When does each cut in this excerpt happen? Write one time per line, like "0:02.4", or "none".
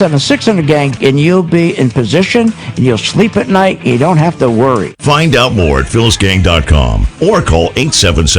0:00.9